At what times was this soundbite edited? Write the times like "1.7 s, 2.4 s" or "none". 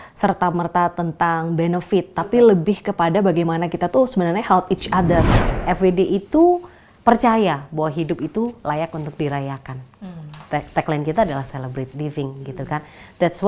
5.3 s